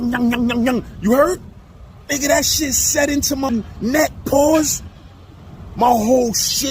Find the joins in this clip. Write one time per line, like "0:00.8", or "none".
0:03.5